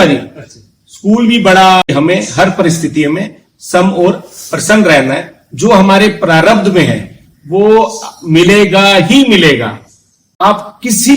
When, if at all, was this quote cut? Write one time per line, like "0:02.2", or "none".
0:01.9
0:10.3